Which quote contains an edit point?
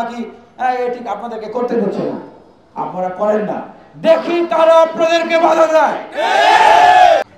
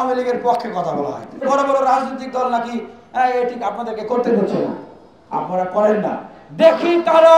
second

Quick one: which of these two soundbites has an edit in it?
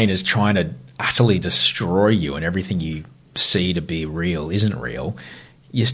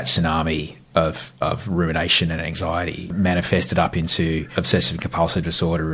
second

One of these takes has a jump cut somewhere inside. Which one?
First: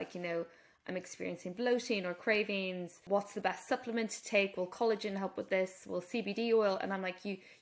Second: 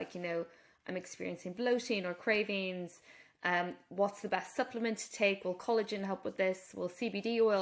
first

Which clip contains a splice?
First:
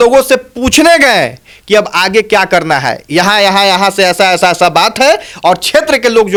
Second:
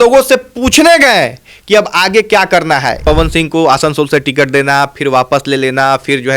second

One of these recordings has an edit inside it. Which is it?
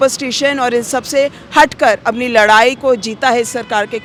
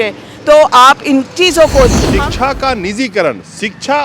second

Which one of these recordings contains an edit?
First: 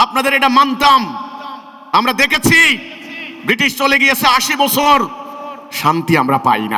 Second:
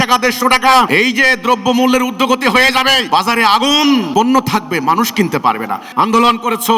second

